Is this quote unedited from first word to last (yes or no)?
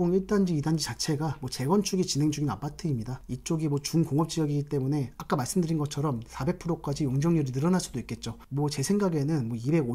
yes